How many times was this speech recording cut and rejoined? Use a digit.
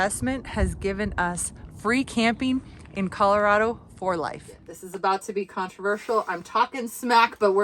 1